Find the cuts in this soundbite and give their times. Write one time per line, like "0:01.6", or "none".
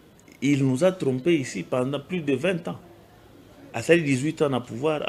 none